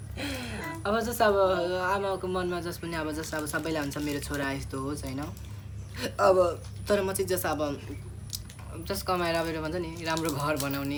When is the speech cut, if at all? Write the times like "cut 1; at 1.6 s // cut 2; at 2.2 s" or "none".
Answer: none